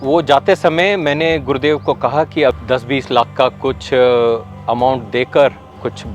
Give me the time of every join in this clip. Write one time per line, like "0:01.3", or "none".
0:02.6